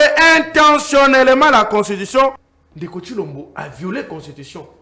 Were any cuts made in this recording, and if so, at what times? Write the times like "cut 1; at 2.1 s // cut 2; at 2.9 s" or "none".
cut 1; at 2.5 s